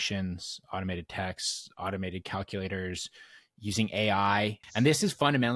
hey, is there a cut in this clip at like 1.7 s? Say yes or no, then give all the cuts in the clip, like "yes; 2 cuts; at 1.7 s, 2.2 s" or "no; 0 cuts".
no; 1 cut; at 4.6 s